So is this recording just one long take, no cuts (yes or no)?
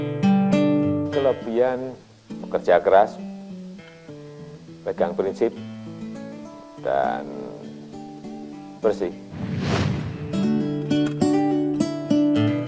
yes